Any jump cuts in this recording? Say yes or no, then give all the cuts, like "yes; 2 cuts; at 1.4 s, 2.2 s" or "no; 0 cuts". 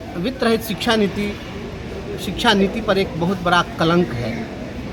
no; 0 cuts